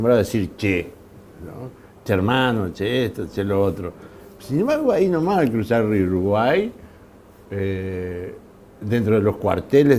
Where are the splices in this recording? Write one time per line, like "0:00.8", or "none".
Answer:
0:01.2